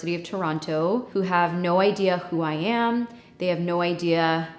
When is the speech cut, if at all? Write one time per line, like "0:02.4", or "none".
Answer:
0:01.1

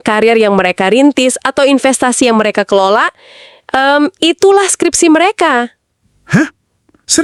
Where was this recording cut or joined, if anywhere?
none

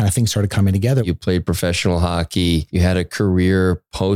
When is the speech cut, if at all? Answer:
0:01.0
0:02.7

